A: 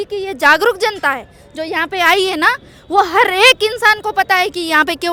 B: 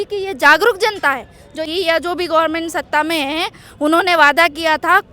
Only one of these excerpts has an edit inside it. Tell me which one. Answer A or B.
B